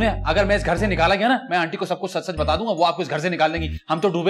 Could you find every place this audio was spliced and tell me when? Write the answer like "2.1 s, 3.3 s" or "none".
none